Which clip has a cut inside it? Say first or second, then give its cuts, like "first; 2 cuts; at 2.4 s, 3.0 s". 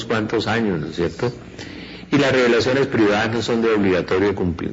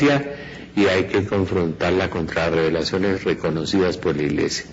second; 1 cut; at 1.6 s